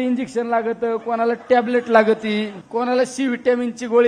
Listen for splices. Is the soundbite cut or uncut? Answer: cut